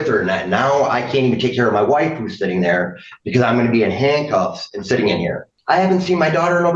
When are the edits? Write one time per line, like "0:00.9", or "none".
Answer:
0:05.6